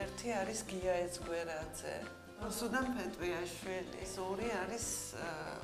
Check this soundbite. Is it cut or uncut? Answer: cut